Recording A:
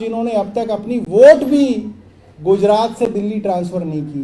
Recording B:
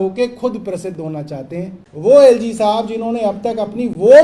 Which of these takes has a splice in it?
B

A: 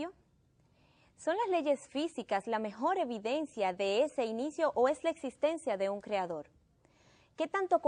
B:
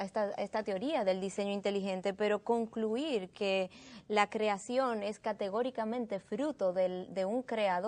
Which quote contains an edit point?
B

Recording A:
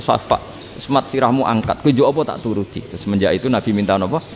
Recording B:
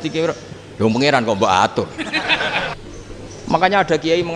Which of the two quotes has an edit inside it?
B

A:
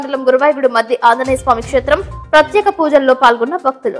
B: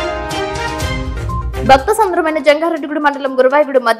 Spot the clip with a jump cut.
B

